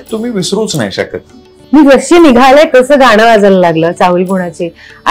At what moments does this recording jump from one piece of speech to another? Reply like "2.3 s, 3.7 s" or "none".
1.6 s